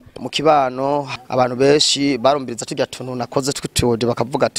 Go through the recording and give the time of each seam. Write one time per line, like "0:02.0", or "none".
0:01.1